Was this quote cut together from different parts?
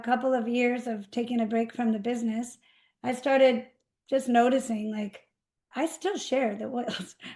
no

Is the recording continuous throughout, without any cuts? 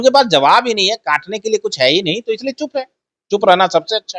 yes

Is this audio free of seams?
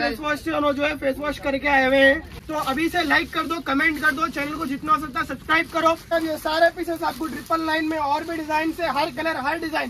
no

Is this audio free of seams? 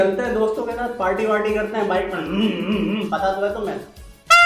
yes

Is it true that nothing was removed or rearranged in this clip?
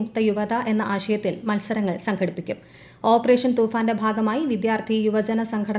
yes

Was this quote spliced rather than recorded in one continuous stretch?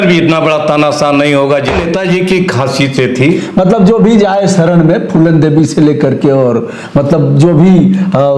yes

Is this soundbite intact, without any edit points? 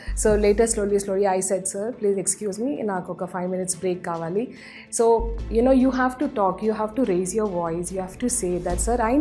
yes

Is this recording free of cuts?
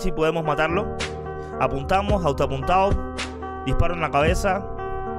yes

